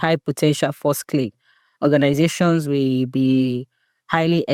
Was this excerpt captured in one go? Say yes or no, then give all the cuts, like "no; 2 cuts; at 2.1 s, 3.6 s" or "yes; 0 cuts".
yes; 0 cuts